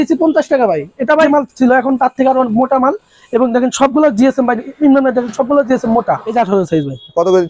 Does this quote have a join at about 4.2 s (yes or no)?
no